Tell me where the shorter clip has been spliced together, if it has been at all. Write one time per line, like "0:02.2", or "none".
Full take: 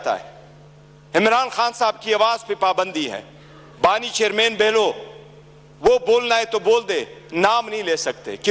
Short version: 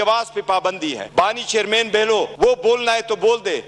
0:01.0
0:02.3